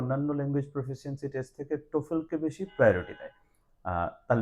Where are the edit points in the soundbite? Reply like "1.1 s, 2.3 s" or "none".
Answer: none